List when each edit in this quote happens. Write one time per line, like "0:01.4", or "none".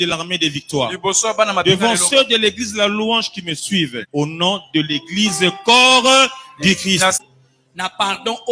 0:04.0
0:07.2